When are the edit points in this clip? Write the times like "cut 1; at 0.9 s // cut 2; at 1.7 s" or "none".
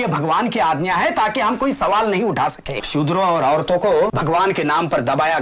cut 1; at 2.8 s // cut 2; at 4.2 s